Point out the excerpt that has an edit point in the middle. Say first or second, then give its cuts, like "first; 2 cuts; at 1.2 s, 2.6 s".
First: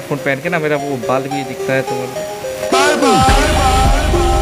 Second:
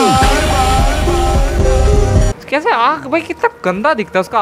second; 1 cut; at 2.3 s